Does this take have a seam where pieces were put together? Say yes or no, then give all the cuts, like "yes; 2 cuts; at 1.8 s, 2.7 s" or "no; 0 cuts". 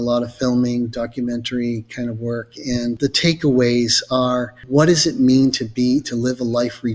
yes; 2 cuts; at 2.9 s, 4.6 s